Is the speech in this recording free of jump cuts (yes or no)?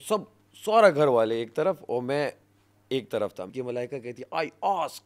no